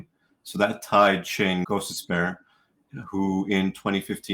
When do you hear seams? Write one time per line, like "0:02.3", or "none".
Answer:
0:01.7